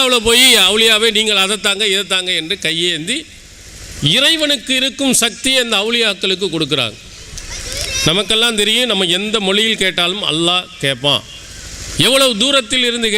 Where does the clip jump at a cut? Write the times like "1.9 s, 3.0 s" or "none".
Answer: none